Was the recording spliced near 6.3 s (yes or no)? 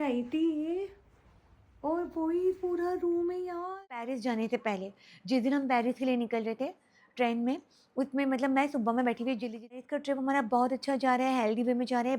no